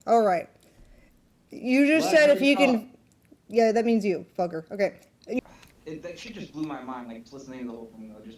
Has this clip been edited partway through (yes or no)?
yes